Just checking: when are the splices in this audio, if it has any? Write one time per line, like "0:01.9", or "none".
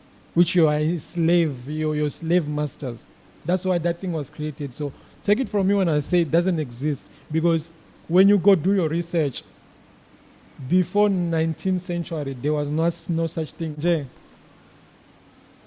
0:13.8